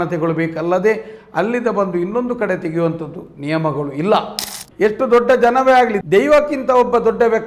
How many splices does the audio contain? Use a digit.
1